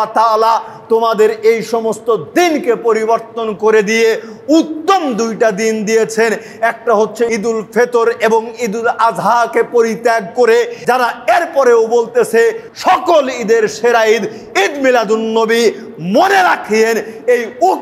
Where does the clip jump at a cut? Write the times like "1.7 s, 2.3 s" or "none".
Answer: 7.3 s, 10.8 s, 12.7 s